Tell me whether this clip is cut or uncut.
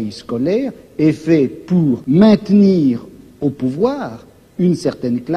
cut